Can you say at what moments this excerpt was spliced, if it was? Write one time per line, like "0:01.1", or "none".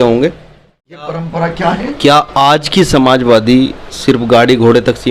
0:01.0